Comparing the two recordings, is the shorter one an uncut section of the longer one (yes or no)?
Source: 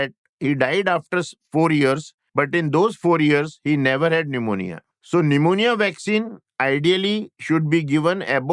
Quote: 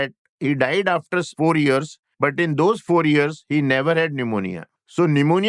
no